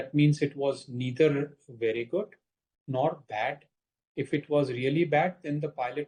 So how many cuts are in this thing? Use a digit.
0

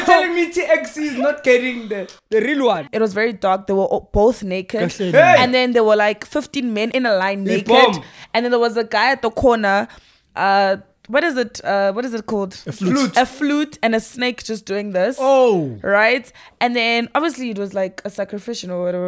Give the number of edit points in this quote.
2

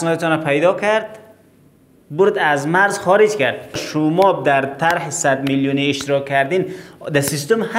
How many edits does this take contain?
1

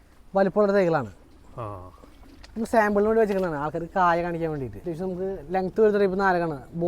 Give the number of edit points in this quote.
1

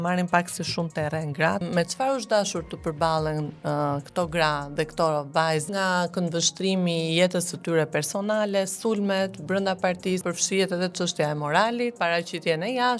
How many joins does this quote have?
4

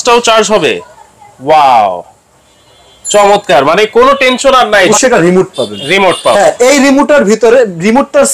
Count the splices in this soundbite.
1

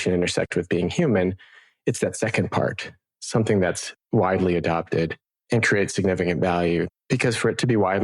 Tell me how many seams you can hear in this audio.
1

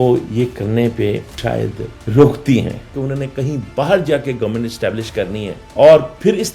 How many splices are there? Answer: 1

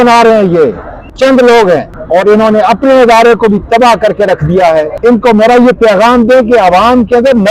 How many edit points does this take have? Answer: 3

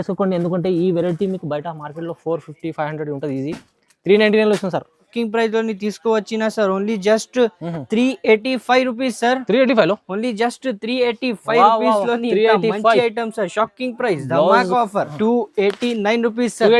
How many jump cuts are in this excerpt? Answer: 2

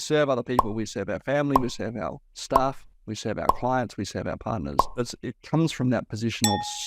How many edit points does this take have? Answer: 1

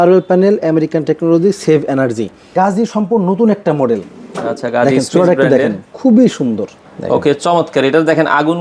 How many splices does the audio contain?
2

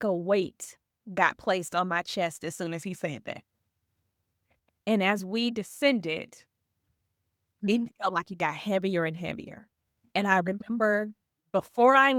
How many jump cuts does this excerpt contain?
0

